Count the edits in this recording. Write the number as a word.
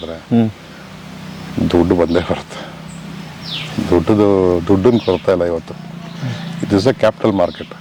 zero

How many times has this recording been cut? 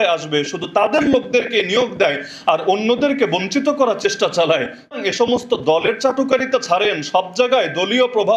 one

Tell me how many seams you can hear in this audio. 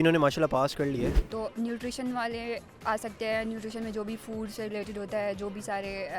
one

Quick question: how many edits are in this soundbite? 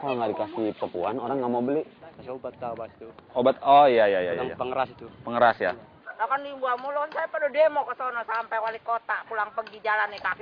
two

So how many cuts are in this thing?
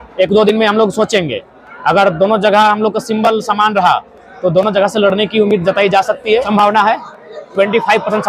one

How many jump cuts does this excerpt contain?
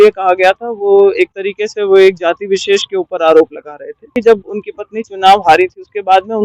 one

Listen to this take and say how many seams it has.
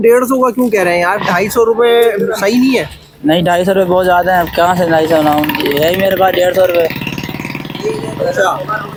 zero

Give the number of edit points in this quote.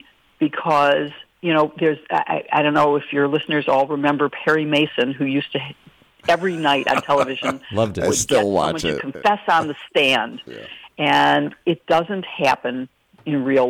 one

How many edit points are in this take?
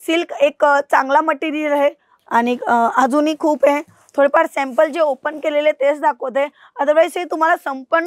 one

